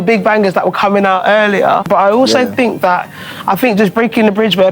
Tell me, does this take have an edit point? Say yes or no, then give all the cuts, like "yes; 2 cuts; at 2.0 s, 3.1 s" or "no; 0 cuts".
yes; 1 cut; at 1.8 s